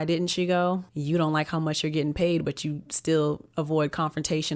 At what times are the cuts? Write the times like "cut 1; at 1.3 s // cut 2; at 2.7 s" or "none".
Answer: cut 1; at 0.9 s

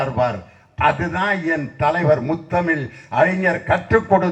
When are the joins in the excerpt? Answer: none

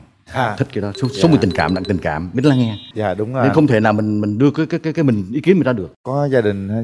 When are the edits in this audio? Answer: none

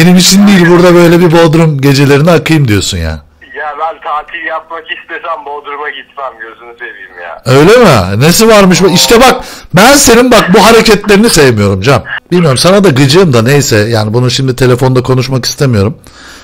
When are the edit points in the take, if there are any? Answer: cut 1; at 12.1 s

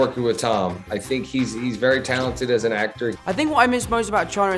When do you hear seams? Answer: cut 1; at 3.2 s

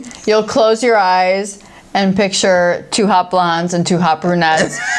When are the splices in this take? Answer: none

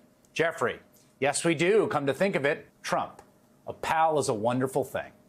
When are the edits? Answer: cut 1; at 2.7 s

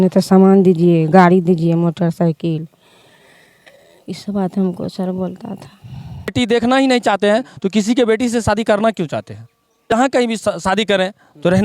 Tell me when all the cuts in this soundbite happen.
cut 1; at 6.3 s // cut 2; at 9.7 s

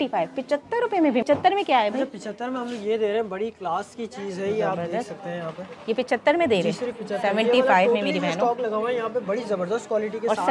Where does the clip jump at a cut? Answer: cut 1; at 1.2 s

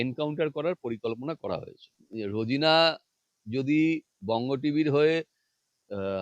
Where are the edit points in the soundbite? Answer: cut 1; at 2.0 s

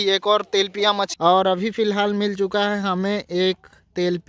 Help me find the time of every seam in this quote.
cut 1; at 1.1 s

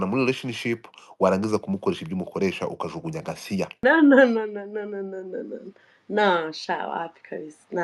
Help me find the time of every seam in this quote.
cut 1; at 3.6 s

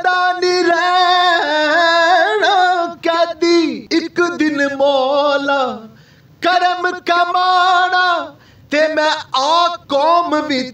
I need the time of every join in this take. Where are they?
cut 1; at 3.8 s

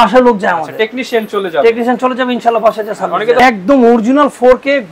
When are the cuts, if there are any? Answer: cut 1; at 3.4 s

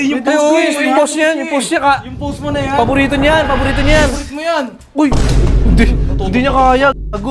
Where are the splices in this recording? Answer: none

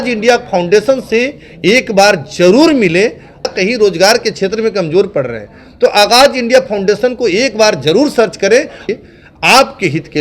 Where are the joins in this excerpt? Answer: cut 1; at 3.4 s // cut 2; at 8.8 s

